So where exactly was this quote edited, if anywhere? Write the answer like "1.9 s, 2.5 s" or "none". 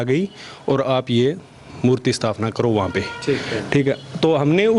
none